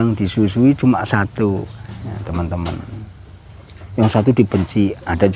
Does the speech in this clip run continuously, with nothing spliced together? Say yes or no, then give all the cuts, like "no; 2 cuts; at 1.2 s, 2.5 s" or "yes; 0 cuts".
yes; 0 cuts